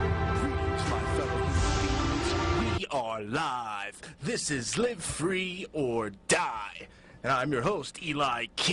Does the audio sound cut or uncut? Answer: uncut